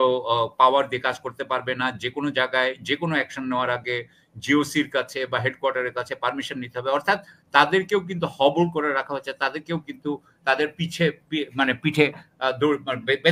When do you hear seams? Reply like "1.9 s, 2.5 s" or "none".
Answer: none

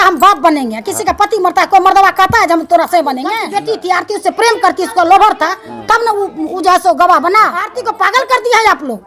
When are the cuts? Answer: 3.4 s, 7.8 s

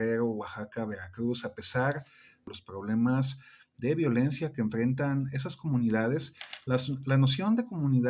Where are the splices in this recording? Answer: 2.5 s

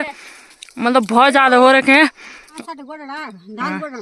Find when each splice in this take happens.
2.5 s

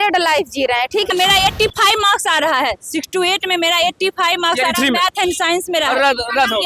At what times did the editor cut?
1.1 s

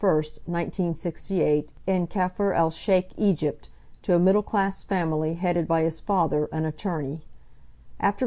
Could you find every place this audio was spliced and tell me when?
1.3 s

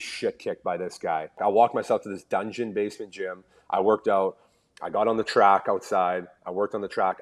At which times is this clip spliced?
1.4 s

